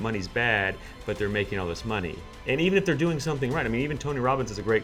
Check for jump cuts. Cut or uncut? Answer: uncut